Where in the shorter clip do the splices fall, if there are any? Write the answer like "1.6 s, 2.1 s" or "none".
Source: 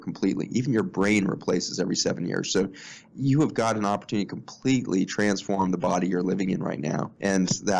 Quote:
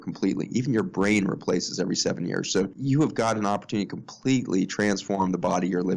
2.8 s

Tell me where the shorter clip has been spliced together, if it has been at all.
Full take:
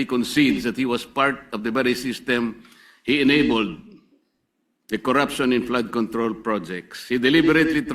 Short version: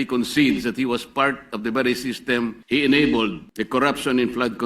2.6 s, 3.5 s

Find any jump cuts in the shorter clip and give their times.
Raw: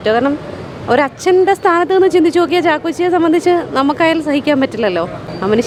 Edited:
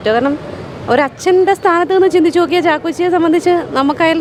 none

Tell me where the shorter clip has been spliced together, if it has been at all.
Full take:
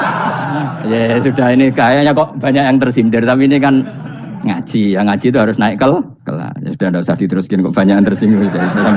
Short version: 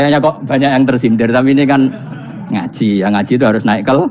none

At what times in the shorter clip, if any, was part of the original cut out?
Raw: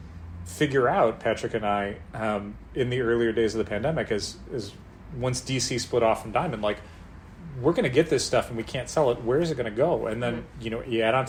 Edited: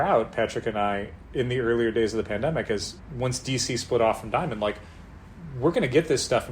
1.2 s, 3.0 s

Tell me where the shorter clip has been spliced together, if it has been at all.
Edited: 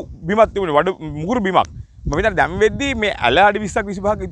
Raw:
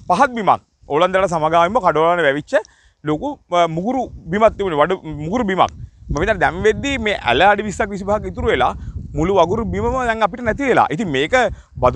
none

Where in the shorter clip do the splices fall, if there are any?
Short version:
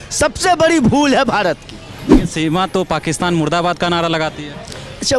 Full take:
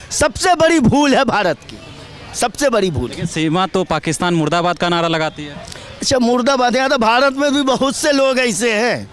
2.2 s

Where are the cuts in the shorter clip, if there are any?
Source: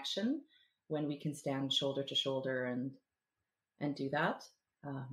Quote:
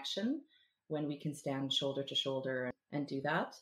2.7 s

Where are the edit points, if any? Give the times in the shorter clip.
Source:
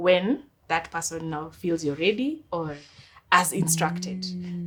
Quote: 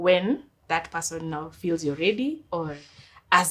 none

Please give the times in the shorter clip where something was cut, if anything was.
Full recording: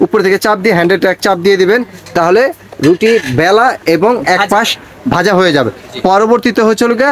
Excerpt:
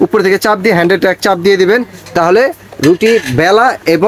none

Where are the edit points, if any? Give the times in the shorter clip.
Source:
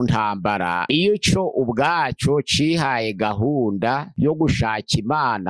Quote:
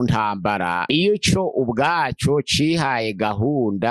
none

